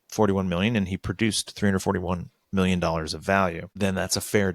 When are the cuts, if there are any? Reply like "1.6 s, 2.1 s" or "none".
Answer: 3.6 s